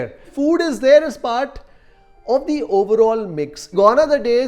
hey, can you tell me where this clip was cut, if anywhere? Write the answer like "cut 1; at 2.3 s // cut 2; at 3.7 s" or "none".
cut 1; at 3.5 s